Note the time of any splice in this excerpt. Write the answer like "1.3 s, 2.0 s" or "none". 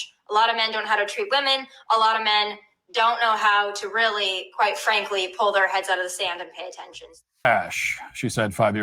7.5 s